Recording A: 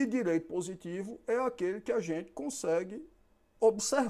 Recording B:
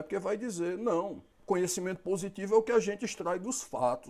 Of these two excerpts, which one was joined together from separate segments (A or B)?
B